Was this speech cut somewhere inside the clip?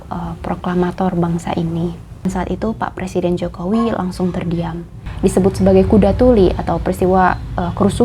yes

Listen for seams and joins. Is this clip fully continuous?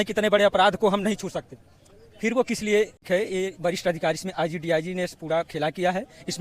no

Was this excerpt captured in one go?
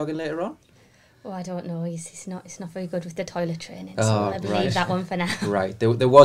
yes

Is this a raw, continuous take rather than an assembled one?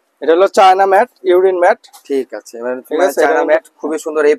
yes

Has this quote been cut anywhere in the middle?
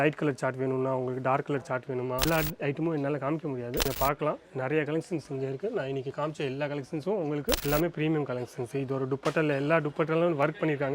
yes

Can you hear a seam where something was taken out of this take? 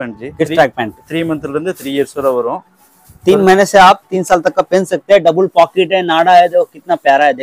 no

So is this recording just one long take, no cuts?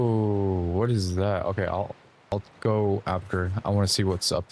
yes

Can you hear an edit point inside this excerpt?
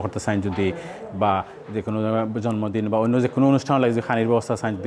no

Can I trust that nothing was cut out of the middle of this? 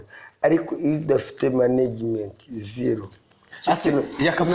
yes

